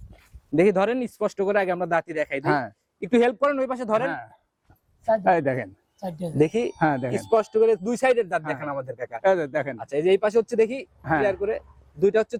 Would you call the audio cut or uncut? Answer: uncut